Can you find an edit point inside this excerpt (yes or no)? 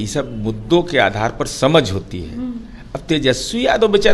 no